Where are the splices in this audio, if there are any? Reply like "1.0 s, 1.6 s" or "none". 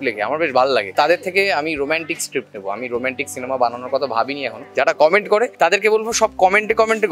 0.9 s, 4.7 s, 5.5 s